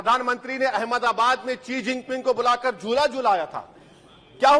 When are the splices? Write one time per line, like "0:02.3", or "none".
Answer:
none